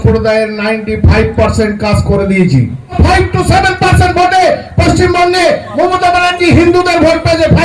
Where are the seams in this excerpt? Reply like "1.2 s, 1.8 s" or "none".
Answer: 3.0 s